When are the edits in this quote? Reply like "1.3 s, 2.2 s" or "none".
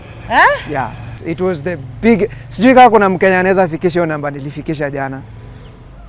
1.2 s